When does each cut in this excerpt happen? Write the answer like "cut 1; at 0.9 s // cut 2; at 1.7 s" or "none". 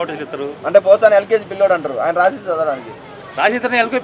none